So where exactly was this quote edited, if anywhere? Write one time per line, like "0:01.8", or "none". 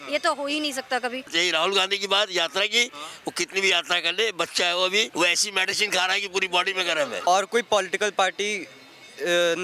0:01.3
0:05.1
0:07.3